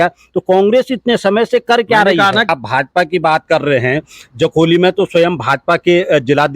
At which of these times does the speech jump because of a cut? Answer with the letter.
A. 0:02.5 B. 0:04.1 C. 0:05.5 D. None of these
A